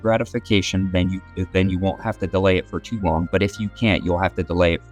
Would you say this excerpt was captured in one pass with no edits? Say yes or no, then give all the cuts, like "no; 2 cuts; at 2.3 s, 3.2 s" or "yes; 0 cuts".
yes; 0 cuts